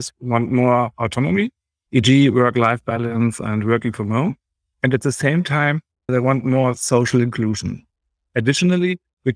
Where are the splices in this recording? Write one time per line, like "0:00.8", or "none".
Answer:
0:07.9